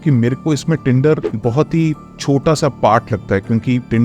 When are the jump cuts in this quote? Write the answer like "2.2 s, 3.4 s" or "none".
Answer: 1.3 s